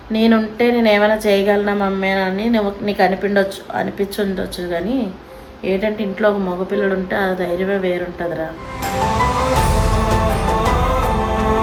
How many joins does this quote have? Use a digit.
0